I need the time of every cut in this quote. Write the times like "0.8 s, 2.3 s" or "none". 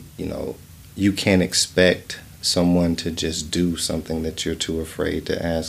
none